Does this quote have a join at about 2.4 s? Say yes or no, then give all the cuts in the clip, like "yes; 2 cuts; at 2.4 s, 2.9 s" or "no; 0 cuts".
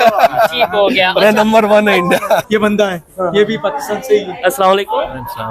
yes; 1 cut; at 2.4 s